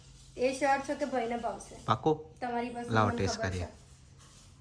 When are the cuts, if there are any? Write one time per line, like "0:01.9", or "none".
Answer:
none